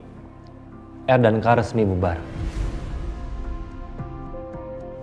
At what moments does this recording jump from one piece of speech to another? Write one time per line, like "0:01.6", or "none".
none